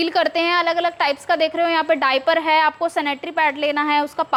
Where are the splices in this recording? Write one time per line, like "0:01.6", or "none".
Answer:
none